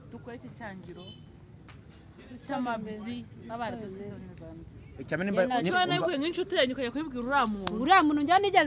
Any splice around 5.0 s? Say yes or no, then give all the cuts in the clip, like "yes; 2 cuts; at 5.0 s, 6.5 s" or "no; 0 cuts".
yes; 1 cut; at 5.0 s